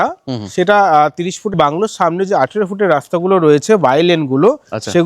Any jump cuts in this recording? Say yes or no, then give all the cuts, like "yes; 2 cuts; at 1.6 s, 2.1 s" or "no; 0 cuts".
yes; 1 cut; at 1.5 s